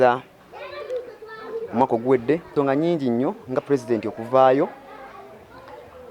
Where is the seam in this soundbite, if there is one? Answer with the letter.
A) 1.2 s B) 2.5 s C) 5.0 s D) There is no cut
B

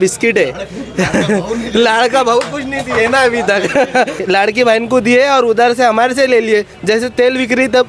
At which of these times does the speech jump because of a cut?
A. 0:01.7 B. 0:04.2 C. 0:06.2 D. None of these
B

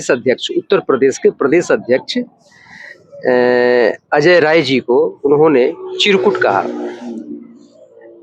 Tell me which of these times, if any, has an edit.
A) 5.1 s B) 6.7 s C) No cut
C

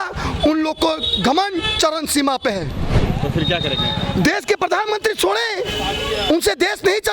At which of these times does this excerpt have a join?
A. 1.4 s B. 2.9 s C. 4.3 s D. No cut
B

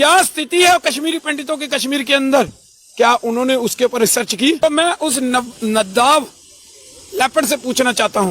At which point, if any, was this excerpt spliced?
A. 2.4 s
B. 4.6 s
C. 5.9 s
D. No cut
B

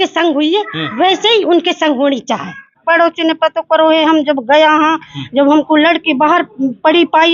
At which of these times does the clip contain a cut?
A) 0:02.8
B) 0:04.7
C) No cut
A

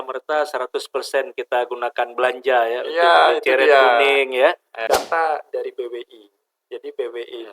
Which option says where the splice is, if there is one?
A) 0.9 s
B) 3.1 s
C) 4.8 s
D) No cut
C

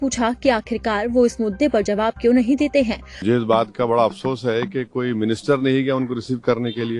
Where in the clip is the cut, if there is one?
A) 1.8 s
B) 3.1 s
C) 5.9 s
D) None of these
B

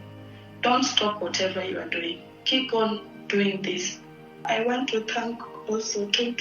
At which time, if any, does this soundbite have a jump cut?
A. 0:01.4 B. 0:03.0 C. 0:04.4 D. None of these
C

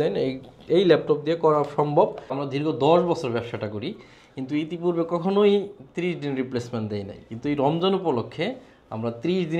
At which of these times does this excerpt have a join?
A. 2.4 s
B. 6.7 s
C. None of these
A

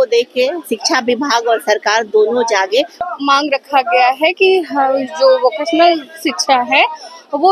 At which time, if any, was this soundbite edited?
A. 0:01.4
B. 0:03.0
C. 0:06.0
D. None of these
B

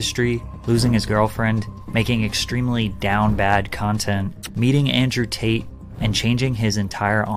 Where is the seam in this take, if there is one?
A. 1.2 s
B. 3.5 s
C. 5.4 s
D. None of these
D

